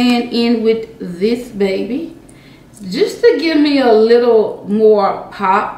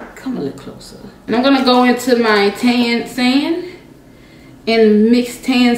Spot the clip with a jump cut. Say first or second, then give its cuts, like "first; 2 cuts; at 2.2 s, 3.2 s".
second; 1 cut; at 1.2 s